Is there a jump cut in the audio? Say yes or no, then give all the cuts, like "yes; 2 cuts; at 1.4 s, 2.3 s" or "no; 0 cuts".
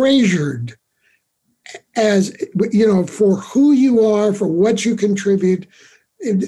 no; 0 cuts